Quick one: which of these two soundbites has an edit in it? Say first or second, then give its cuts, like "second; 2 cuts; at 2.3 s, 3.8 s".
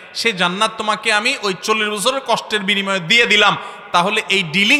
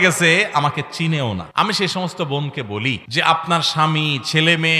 second; 2 cuts; at 1.5 s, 3.0 s